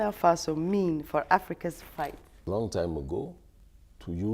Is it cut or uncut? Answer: cut